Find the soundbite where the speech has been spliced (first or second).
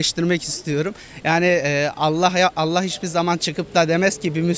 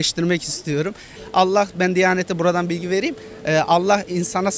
second